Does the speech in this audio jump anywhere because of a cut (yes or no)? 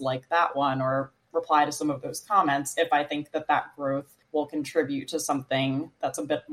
yes